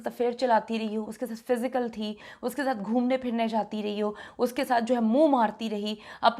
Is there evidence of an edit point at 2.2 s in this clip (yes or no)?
no